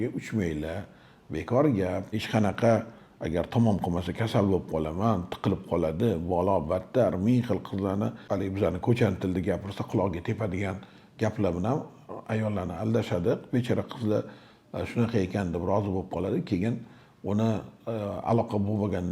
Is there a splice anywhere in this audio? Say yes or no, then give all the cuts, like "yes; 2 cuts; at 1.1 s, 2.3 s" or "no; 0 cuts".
yes; 2 cuts; at 2.2 s, 8.2 s